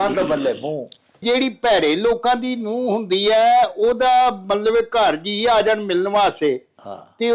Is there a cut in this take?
yes; 1 cut; at 1.2 s

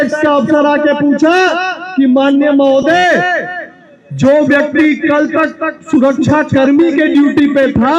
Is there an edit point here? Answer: no; 0 cuts

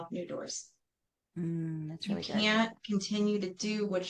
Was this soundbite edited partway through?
no; 0 cuts

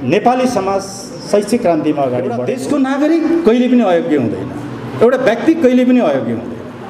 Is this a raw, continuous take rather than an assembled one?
no; 1 cut; at 2.5 s

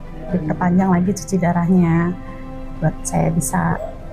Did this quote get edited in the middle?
no; 0 cuts

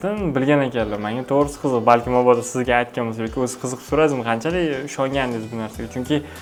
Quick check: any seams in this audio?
no; 0 cuts

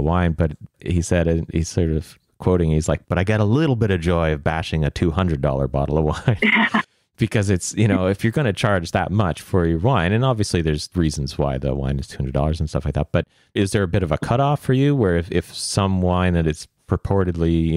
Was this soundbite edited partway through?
no; 0 cuts

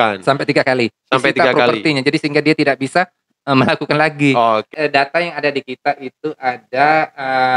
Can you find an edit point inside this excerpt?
yes; 1 cut; at 4.7 s

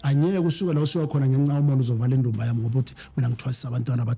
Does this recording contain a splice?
no; 0 cuts

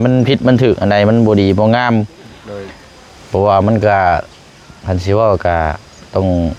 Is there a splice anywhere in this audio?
no; 0 cuts

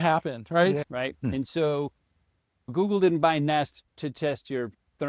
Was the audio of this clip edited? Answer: yes; 3 cuts; at 0.8 s, 2.7 s, 3.8 s

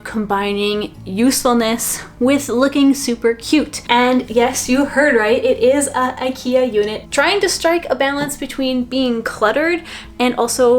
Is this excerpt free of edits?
no; 2 cuts; at 3.8 s, 7.0 s

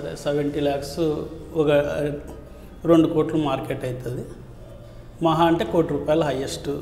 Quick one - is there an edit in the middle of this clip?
no; 0 cuts

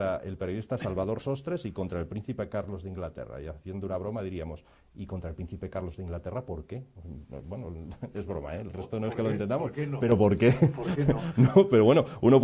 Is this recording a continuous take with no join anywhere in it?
no; 1 cut; at 8.5 s

